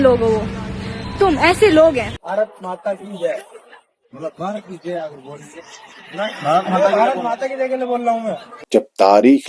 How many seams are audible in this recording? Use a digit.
2